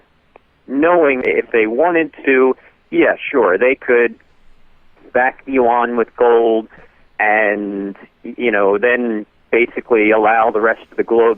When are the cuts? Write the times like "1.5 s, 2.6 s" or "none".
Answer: 1.2 s